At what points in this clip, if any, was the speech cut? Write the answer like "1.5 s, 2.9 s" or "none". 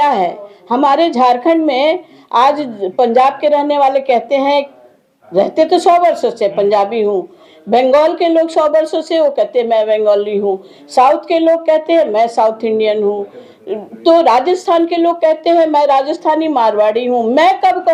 none